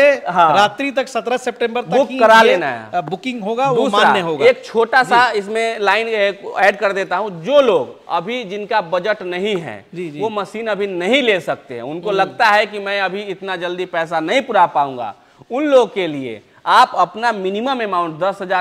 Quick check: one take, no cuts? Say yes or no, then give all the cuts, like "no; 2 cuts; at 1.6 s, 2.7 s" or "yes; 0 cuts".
yes; 0 cuts